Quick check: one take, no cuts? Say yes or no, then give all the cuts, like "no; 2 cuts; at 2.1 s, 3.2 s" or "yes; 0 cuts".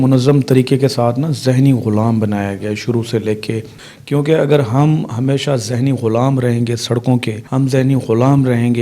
no; 2 cuts; at 3.8 s, 7.4 s